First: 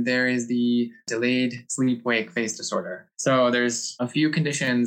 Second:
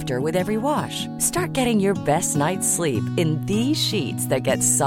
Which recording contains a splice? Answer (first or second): first